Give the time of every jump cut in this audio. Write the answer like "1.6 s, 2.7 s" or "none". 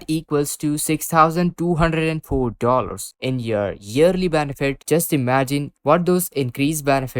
3.1 s, 4.8 s